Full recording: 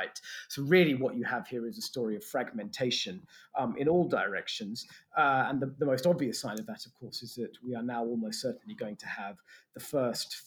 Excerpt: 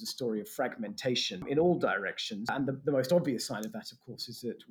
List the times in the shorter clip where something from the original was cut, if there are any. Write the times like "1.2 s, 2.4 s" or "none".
1.4 s, 2.5 s